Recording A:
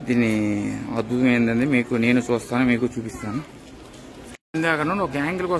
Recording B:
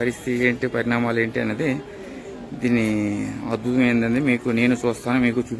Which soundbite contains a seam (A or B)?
A